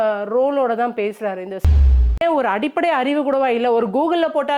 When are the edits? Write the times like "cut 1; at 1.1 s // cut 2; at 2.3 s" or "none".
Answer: cut 1; at 1.7 s